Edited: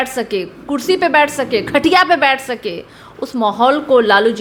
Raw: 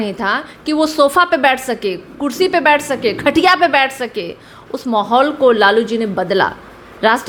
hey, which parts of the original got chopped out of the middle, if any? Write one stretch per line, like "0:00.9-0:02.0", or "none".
none